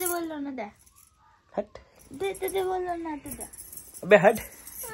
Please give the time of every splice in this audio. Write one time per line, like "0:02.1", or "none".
none